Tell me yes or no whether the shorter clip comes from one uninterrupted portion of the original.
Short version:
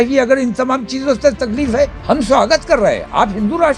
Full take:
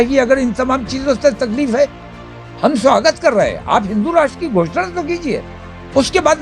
no